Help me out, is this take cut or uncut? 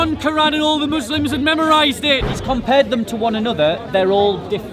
cut